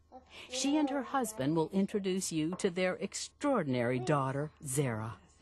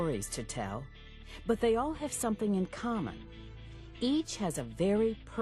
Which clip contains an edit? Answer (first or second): second